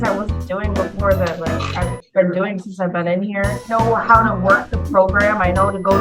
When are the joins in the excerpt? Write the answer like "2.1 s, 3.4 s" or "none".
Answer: none